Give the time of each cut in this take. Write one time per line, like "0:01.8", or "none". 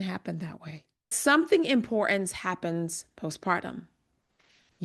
0:01.1